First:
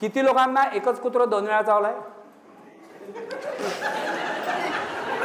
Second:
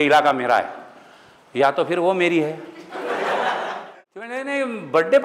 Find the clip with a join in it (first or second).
second